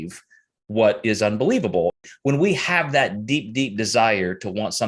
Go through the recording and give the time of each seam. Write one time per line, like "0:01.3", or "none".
0:02.0